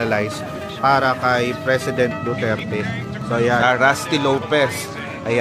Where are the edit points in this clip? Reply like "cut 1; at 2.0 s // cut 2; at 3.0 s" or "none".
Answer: cut 1; at 3.6 s